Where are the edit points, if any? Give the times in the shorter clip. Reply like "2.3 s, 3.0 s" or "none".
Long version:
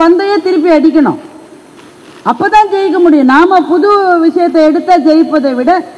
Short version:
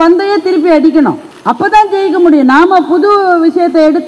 1.3 s

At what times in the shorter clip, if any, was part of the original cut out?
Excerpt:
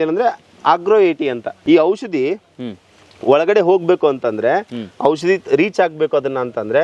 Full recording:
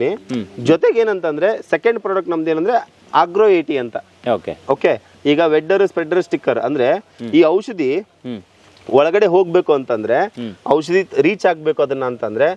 1.5 s

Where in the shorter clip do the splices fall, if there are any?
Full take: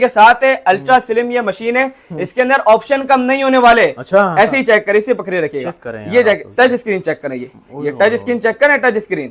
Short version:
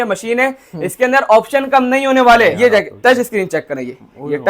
2.6 s

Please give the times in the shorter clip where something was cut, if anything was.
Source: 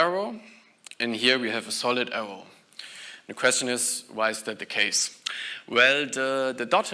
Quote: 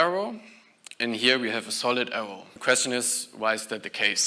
2.4 s

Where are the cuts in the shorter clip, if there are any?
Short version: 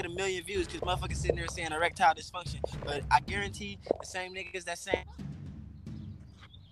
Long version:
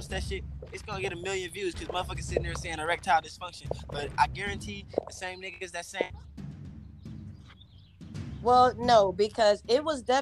5.1 s

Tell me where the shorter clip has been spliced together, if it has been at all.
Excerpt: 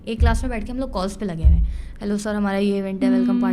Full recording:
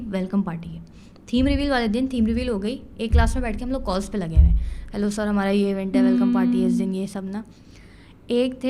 none

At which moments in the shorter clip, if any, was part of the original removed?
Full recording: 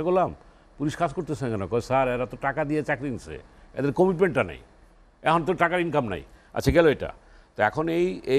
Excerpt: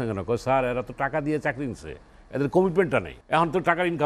3.2 s

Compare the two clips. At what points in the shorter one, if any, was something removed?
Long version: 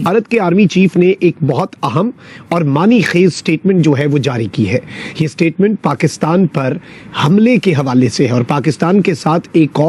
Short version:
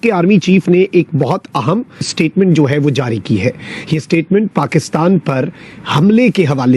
2.1 s

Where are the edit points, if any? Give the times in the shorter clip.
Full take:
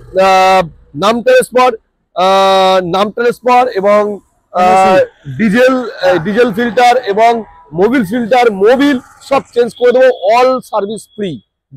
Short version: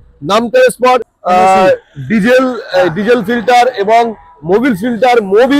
1.1 s

